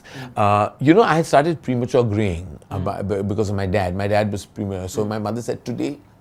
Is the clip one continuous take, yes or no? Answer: yes